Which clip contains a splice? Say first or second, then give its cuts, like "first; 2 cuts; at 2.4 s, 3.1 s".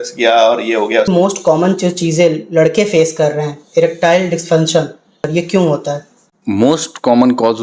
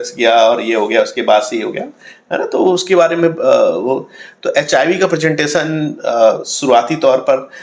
first; 2 cuts; at 1.1 s, 5.3 s